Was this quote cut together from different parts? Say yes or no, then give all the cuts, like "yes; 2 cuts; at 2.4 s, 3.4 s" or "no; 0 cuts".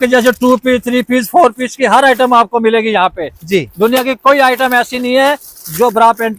no; 0 cuts